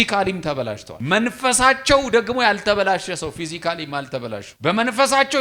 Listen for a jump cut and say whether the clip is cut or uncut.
cut